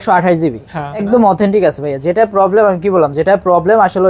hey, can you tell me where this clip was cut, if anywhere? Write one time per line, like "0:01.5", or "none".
0:01.0